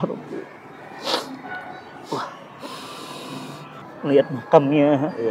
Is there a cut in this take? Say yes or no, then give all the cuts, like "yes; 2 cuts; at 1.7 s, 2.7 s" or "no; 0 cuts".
yes; 1 cut; at 3.8 s